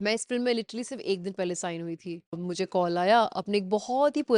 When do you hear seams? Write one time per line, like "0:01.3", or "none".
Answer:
0:02.4